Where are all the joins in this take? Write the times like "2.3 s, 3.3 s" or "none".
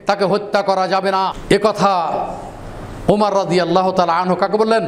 1.4 s